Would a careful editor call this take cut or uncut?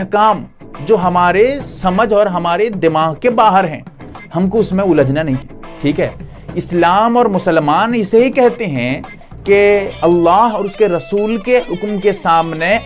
uncut